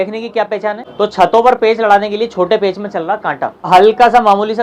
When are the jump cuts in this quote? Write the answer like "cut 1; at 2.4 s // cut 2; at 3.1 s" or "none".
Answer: cut 1; at 0.8 s // cut 2; at 3.7 s

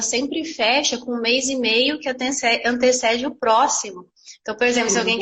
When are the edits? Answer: none

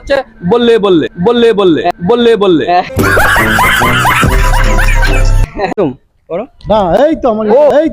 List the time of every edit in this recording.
cut 1; at 5.7 s

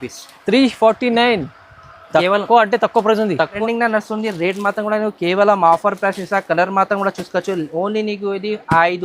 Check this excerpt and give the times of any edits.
cut 1; at 3.5 s

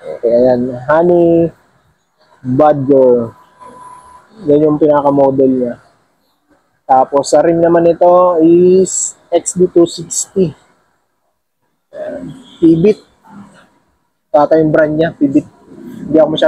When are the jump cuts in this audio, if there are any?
none

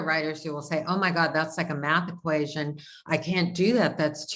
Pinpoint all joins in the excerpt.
none

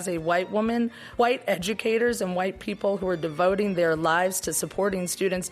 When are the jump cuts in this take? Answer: cut 1; at 1.0 s

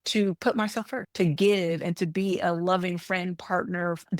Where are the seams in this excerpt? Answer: cut 1; at 0.9 s

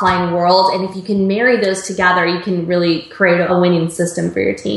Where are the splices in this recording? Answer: cut 1; at 3.5 s

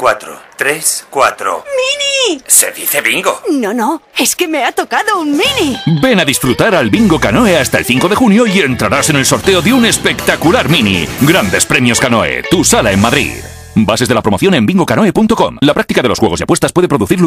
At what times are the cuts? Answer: none

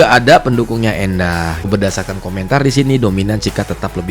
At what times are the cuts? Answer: cut 1; at 1.7 s

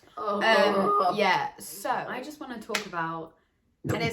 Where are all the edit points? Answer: cut 1; at 2.1 s

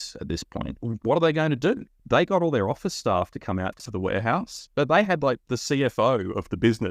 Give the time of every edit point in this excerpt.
cut 1; at 0.8 s // cut 2; at 1.9 s // cut 3; at 3.9 s

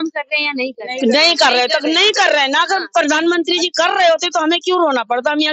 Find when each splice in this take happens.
none

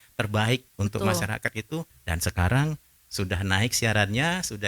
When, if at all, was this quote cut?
cut 1; at 2.0 s

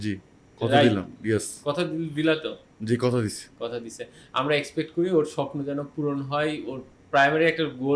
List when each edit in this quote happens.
none

